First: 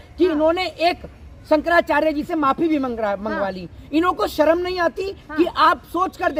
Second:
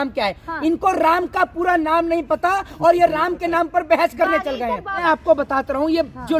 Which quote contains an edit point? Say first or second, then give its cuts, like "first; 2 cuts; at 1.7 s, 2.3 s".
second; 1 cut; at 5.0 s